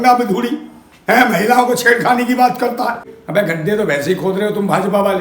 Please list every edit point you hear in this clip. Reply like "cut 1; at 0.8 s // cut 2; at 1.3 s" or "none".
cut 1; at 3.1 s